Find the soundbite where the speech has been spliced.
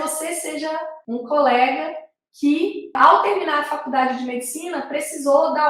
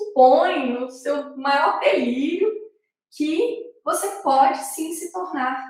first; 2 cuts; at 0.9 s, 2.9 s

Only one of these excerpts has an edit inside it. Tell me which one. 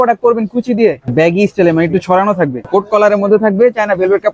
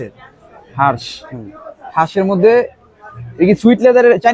first; 2 cuts; at 1.1 s, 2.6 s

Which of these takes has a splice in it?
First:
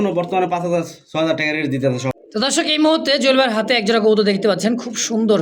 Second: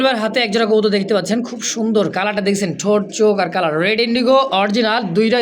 first; 1 cut; at 2.1 s

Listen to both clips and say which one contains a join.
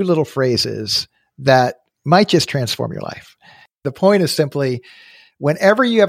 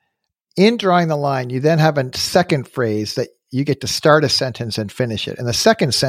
first; 1 cut; at 3.8 s

